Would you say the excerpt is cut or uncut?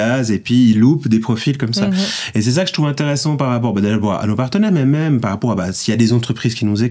uncut